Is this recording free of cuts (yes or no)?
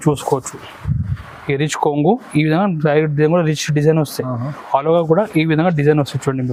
yes